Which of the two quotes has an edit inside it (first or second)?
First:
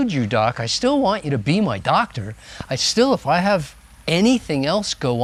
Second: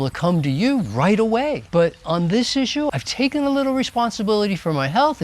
second